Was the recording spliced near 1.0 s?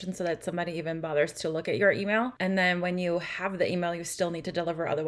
no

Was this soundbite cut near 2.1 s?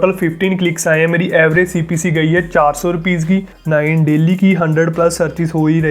no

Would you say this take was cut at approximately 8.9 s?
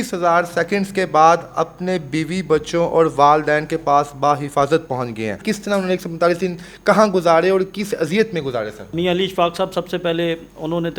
yes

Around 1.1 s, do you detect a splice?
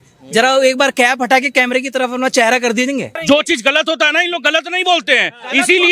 no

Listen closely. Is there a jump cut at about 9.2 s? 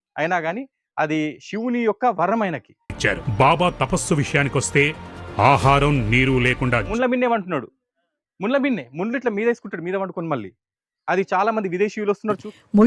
no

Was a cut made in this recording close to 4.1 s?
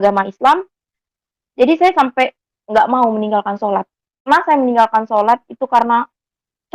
yes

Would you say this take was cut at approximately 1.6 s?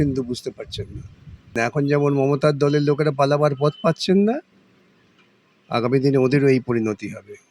yes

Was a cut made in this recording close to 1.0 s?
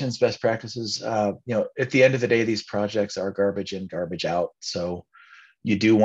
no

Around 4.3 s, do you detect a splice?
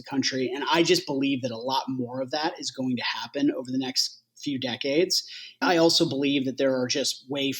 no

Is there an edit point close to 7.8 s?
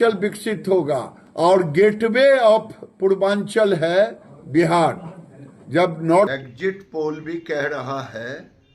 no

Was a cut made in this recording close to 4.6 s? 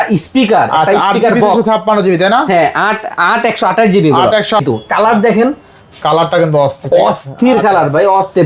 yes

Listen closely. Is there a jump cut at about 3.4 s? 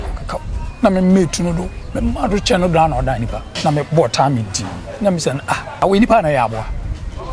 yes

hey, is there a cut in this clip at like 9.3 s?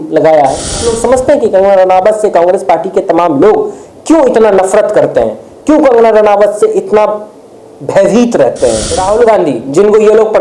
yes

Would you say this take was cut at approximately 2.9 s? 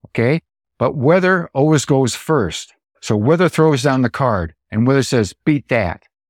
yes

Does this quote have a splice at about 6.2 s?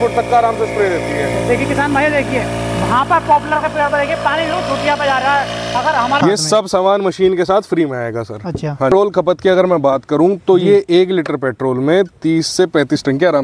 yes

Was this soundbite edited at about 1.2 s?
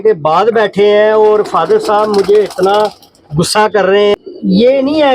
no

